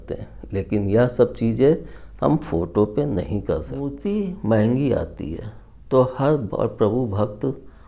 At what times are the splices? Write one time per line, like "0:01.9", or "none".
0:04.0

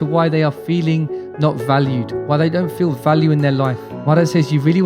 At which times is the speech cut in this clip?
0:03.9

